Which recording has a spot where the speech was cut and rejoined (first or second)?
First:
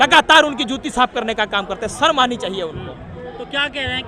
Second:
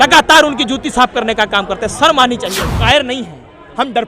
second